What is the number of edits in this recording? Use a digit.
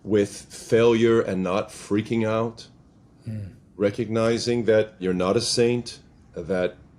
1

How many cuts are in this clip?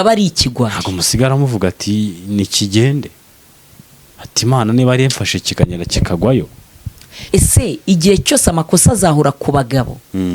1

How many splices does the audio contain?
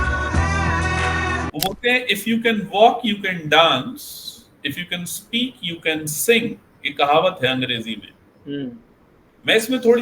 1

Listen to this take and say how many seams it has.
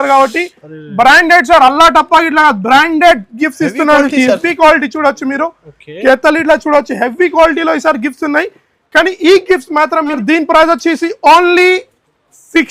1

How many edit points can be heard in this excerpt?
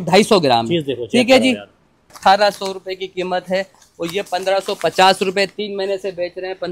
1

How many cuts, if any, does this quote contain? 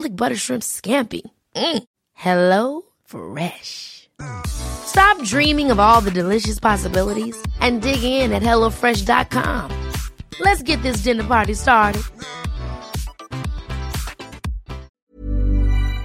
1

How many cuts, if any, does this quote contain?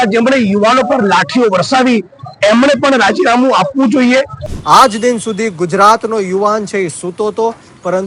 1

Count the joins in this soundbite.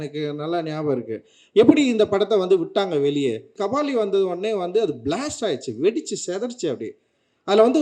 1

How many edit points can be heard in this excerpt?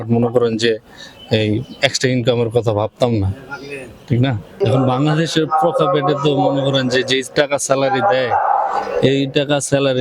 0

